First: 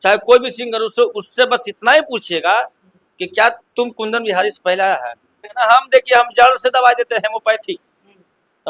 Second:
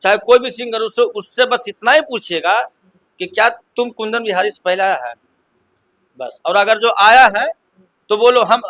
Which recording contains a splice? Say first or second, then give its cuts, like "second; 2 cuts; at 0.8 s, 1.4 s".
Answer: first; 1 cut; at 5.5 s